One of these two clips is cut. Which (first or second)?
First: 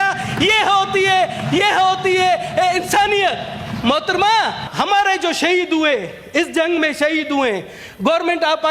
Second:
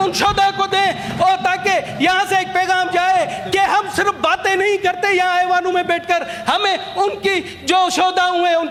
first